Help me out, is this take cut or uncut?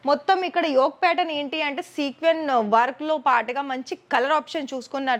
uncut